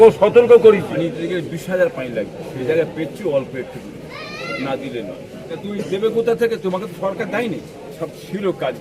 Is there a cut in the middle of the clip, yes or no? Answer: yes